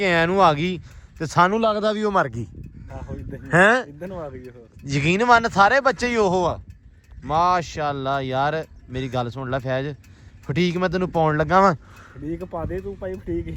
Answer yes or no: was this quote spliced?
no